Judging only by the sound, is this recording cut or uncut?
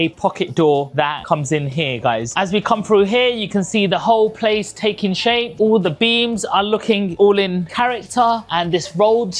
uncut